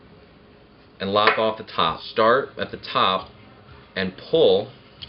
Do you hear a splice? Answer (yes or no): yes